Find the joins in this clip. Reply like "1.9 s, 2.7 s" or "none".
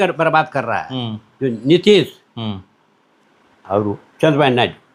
none

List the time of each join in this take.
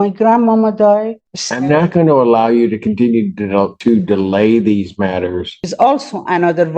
1.2 s, 5.5 s

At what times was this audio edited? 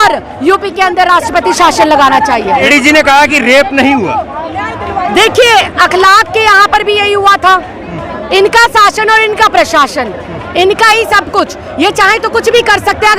2.7 s

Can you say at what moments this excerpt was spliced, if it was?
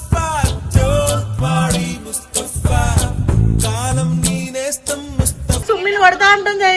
5.6 s

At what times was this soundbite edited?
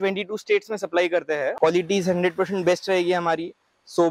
1.5 s

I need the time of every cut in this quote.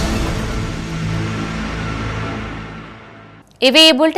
none

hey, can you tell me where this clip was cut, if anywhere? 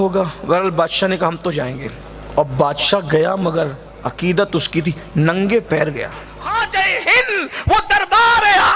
6.4 s

